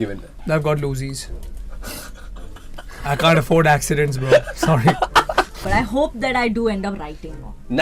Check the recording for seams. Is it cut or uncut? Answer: cut